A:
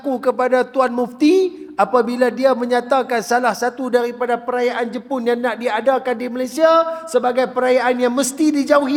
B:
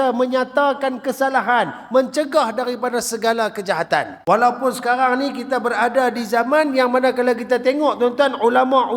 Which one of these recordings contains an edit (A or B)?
B